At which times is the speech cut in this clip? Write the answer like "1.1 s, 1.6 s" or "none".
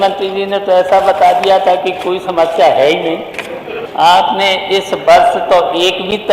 3.8 s